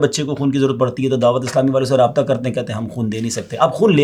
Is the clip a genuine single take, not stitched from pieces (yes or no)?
yes